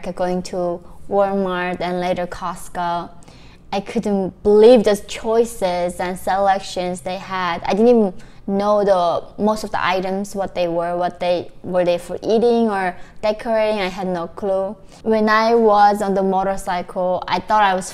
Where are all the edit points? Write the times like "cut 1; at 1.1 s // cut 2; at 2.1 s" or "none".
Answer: cut 1; at 14.9 s

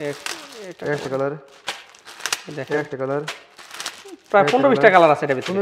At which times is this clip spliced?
none

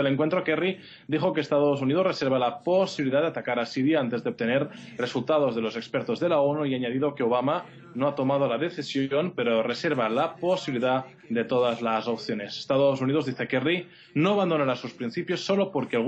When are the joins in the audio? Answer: none

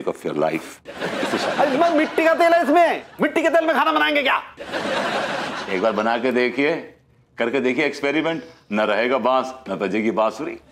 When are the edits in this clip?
none

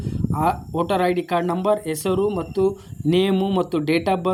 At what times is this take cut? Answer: none

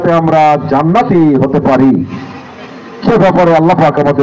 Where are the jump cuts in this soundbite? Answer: none

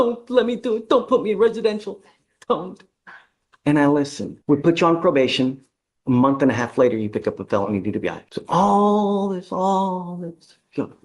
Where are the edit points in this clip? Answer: cut 1; at 4.3 s // cut 2; at 8.3 s

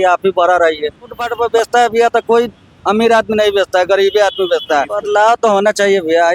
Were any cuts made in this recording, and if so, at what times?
cut 1; at 1.2 s // cut 2; at 5.0 s

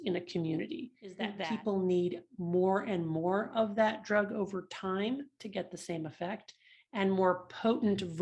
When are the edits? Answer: cut 1; at 1.3 s

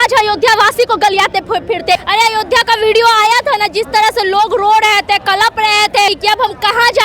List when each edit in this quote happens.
cut 1; at 1.9 s // cut 2; at 6.1 s

